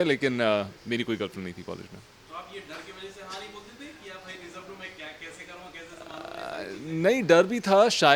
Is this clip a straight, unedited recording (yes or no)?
yes